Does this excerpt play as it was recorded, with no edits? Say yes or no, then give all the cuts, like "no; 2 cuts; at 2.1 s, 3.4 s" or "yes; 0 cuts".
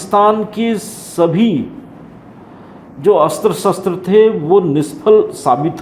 yes; 0 cuts